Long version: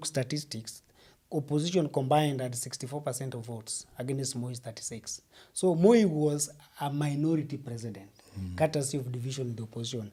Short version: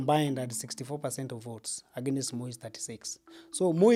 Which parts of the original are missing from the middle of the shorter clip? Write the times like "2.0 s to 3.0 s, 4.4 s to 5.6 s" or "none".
none